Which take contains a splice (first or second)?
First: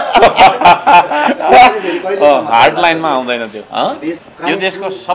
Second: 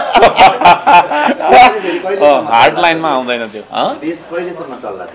first